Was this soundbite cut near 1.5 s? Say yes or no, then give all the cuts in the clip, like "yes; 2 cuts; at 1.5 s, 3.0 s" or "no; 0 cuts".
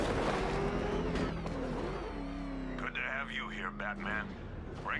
no; 1 cut; at 3.6 s